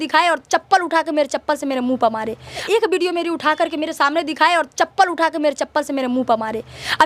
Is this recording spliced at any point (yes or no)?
no